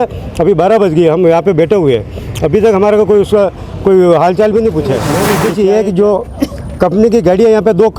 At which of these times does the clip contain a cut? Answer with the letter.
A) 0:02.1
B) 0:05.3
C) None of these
B